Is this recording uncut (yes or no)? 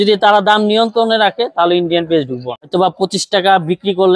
no